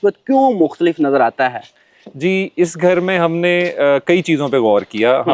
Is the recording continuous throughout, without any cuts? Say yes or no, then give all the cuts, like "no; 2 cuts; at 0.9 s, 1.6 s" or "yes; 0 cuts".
yes; 0 cuts